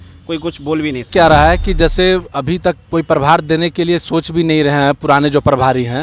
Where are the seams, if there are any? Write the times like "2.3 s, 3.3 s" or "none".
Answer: 1.1 s